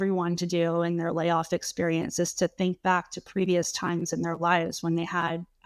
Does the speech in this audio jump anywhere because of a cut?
no; 0 cuts

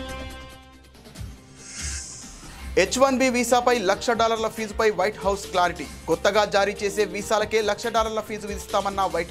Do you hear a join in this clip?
yes; 1 cut; at 2.7 s

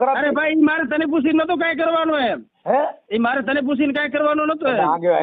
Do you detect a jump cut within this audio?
yes; 1 cut; at 3.0 s

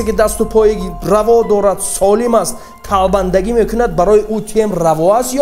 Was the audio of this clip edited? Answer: yes; 1 cut; at 0.9 s

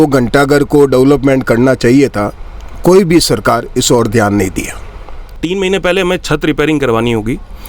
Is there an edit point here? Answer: yes; 1 cut; at 4.9 s

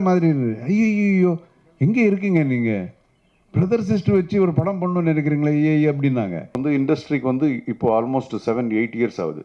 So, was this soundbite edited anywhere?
yes; 1 cut; at 6.6 s

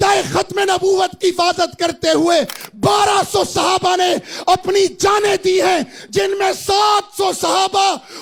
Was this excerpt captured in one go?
yes; 0 cuts

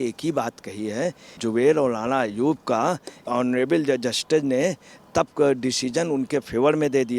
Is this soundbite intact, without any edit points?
no; 2 cuts; at 1.4 s, 3.3 s

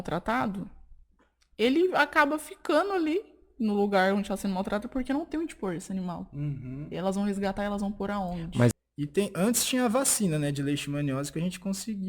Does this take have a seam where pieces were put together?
yes; 1 cut; at 8.7 s

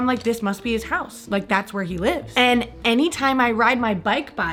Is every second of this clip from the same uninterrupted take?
yes; 0 cuts

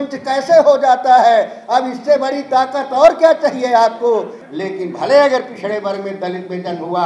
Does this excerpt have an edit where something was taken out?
yes; 1 cut; at 4.4 s

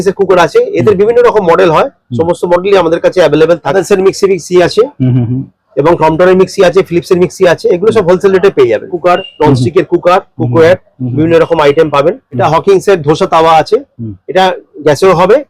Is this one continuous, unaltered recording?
no; 3 cuts; at 3.7 s, 8.9 s, 12.3 s

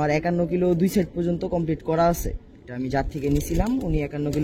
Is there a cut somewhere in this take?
no; 0 cuts

